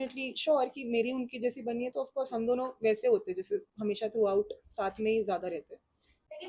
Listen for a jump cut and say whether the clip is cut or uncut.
uncut